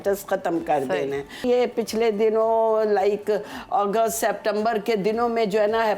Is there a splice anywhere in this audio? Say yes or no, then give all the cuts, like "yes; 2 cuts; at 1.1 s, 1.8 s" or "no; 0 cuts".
yes; 1 cut; at 1.4 s